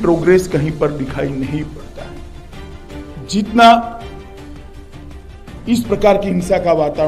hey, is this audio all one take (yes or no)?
no